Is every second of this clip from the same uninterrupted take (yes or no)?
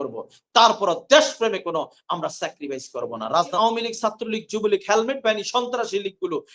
no